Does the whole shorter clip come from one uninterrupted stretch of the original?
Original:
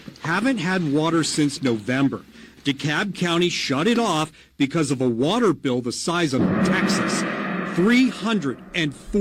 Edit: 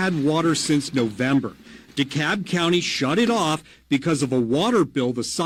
yes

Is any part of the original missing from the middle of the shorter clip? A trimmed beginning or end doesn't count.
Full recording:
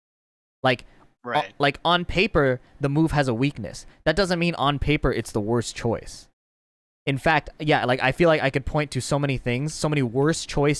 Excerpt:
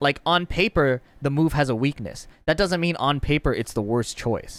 no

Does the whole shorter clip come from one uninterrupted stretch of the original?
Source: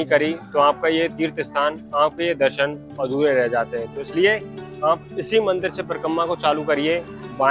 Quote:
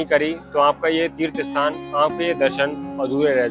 yes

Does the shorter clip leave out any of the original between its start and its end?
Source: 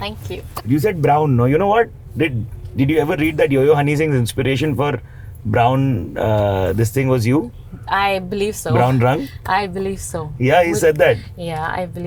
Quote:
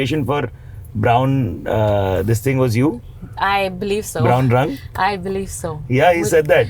no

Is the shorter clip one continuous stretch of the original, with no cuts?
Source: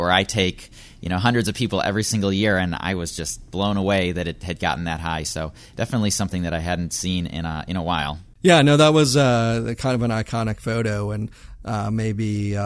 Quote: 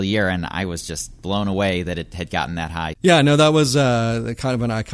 no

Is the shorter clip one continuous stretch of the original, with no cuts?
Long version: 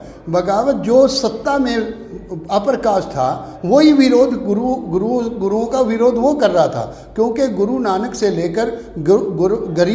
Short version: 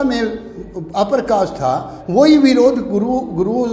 yes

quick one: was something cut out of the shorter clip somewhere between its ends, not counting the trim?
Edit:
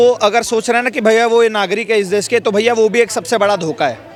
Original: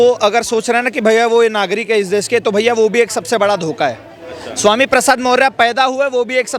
no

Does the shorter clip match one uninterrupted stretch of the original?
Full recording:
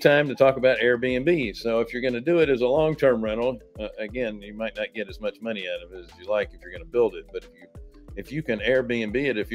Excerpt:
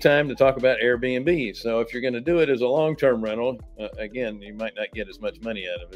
yes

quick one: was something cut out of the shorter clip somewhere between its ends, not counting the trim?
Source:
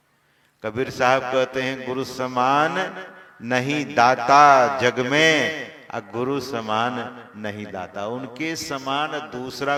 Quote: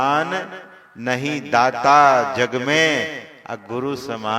no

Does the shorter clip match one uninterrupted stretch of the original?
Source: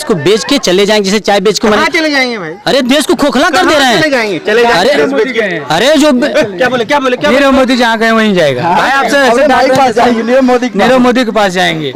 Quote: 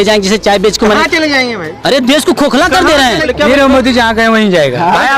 no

